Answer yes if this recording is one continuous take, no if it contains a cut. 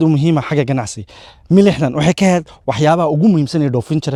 yes